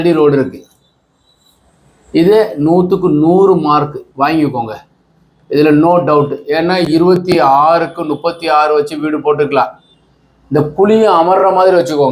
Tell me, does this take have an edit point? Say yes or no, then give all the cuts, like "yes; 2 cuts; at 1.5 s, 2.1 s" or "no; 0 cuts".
no; 0 cuts